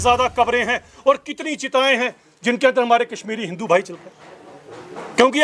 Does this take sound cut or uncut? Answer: uncut